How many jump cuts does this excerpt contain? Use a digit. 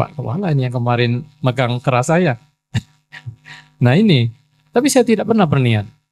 0